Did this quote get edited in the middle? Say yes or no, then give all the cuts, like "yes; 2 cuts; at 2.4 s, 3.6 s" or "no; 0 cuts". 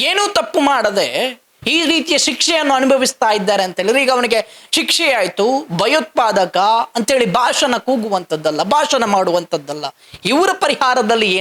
no; 0 cuts